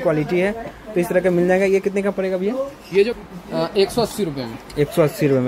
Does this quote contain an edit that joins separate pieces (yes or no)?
no